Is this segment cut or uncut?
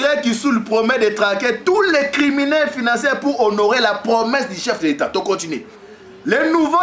uncut